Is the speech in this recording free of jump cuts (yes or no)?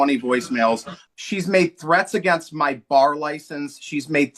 no